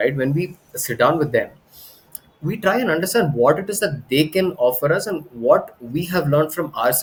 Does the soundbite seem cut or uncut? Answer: uncut